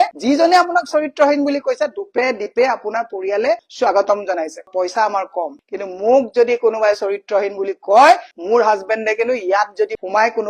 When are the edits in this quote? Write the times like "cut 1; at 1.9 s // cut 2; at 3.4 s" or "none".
cut 1; at 4.7 s